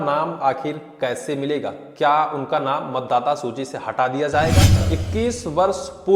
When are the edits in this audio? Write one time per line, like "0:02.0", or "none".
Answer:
0:04.8